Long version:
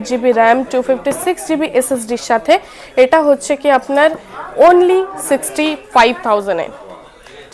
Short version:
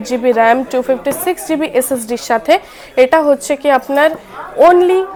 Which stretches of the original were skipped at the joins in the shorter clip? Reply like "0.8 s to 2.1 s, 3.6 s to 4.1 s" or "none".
none